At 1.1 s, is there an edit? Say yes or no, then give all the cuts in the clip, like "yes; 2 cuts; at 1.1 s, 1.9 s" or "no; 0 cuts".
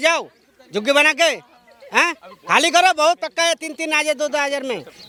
no; 0 cuts